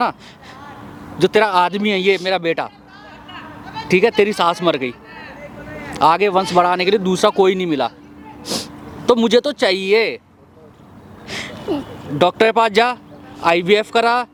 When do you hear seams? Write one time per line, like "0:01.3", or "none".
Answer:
none